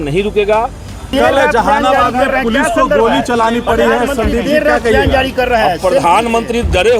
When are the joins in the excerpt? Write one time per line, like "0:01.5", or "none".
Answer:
0:01.1